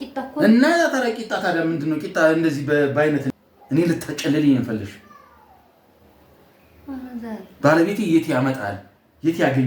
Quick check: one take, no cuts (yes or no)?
no